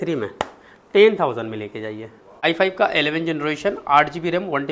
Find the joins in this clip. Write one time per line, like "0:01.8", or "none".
0:02.4